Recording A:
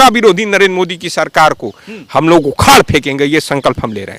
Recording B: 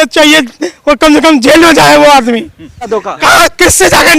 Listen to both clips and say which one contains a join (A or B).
B